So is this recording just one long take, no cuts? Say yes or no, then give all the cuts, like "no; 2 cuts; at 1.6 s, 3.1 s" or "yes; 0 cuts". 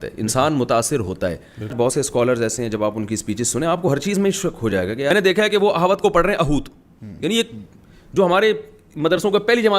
no; 2 cuts; at 1.7 s, 5.1 s